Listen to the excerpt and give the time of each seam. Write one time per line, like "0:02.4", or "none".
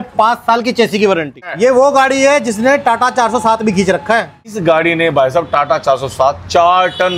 0:01.6
0:04.5

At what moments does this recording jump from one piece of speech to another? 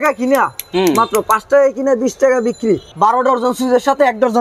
0:02.9

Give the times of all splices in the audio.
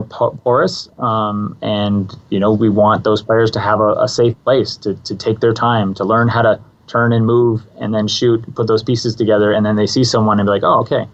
none

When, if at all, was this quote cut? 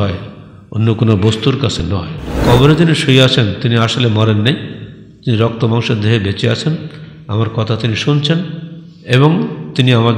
0:01.8

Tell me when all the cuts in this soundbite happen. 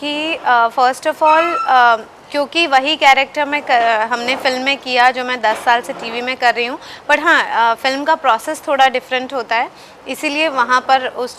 none

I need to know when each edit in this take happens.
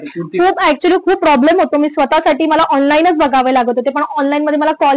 none

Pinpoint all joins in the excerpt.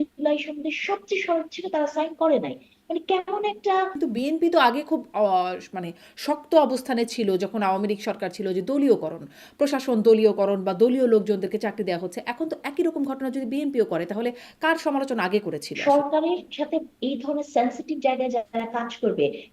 0:03.9
0:15.7

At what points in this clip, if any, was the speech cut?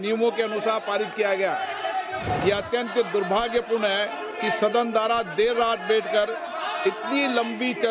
0:02.3

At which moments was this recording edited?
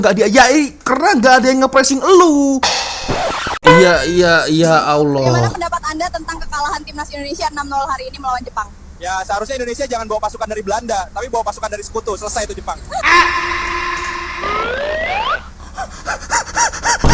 0:03.2

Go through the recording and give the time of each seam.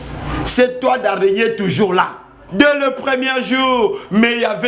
0:02.4

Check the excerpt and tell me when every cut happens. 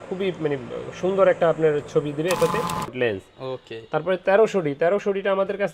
0:02.9

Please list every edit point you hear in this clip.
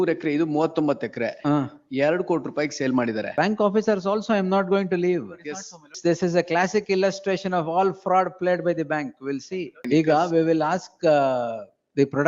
0:03.3
0:05.9
0:09.8

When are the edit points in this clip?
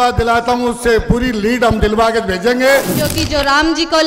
0:03.0

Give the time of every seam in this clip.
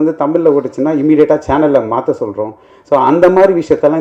none

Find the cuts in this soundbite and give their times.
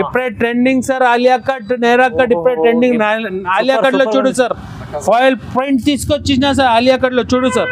none

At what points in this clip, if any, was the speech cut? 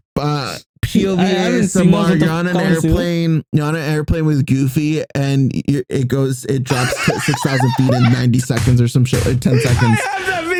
none

